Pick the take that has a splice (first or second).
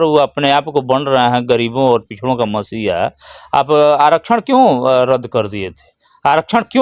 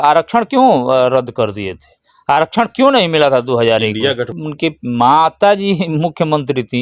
second